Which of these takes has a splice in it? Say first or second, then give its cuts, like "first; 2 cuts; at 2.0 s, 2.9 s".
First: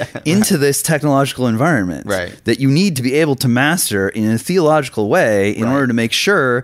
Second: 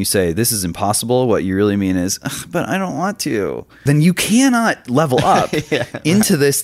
second; 1 cut; at 3.8 s